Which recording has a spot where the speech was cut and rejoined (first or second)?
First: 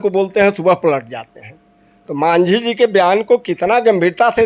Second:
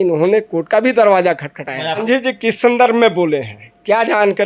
second